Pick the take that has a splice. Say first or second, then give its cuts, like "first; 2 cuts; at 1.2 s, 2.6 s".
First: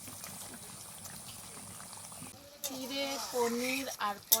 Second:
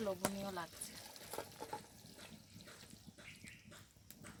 first; 1 cut; at 2.3 s